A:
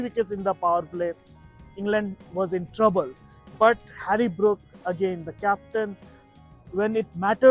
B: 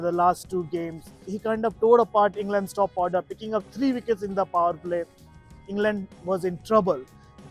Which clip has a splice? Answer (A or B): B